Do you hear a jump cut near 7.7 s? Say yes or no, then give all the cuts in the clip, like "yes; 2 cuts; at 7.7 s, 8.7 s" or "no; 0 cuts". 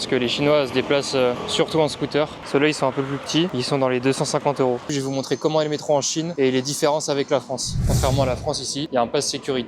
yes; 4 cuts; at 1.4 s, 2.4 s, 4.9 s, 7.7 s